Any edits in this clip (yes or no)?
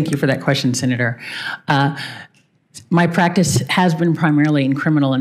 no